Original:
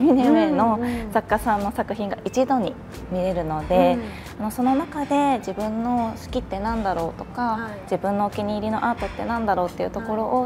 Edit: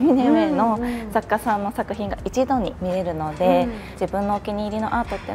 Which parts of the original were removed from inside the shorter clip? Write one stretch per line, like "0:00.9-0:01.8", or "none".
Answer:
0:02.8-0:03.1
0:04.1-0:07.7